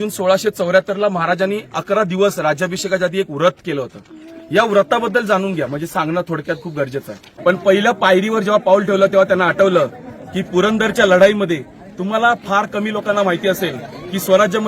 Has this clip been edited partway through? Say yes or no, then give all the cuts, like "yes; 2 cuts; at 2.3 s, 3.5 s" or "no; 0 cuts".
yes; 1 cut; at 7.3 s